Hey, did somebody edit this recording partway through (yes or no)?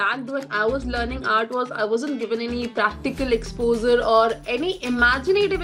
no